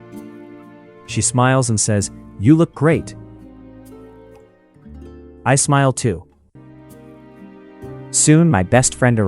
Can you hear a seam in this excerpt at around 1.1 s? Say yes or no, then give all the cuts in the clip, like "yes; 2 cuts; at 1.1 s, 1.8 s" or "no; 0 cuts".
yes; 3 cuts; at 1.1 s, 3.0 s, 4.7 s